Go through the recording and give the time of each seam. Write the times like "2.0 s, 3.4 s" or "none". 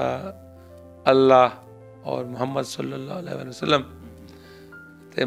none